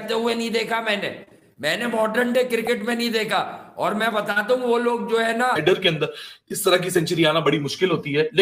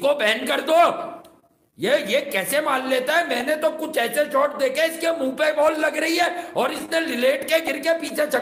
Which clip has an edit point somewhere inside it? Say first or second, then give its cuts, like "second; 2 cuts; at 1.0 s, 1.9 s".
first; 1 cut; at 5.6 s